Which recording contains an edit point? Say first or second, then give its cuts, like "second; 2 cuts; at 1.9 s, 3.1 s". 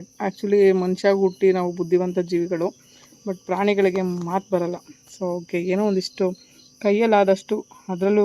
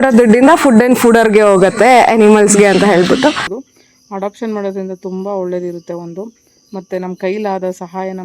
second; 1 cut; at 3.4 s